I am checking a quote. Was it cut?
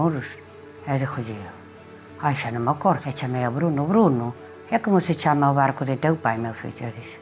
yes; 1 cut; at 3.0 s

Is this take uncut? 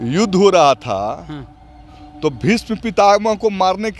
yes; 0 cuts

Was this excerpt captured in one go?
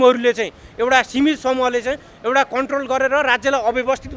yes; 0 cuts

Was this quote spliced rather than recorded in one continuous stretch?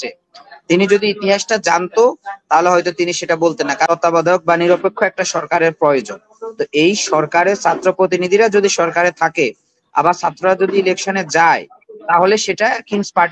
yes; 1 cut; at 3.9 s

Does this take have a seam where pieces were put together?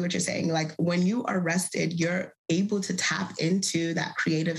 no; 0 cuts

